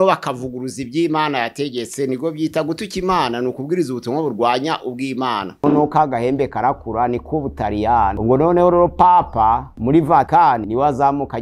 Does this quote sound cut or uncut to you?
cut